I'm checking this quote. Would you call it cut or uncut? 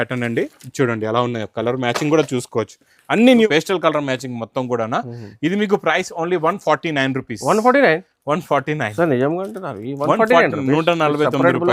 cut